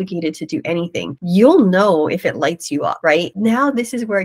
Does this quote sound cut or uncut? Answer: cut